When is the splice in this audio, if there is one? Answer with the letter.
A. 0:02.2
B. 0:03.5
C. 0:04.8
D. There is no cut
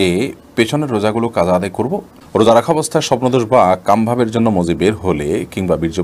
A